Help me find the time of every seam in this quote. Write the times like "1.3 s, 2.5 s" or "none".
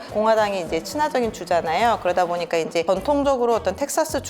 2.8 s